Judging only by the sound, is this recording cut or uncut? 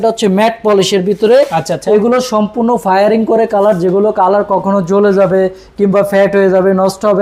uncut